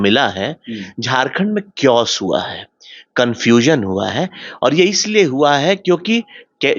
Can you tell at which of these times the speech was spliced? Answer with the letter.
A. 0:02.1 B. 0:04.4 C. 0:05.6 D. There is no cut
D